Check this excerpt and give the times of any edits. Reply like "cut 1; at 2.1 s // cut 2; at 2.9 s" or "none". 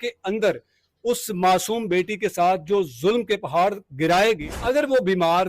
cut 1; at 4.4 s